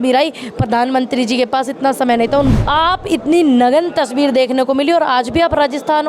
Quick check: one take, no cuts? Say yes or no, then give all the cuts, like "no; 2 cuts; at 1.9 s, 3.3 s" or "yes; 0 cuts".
no; 1 cut; at 2.5 s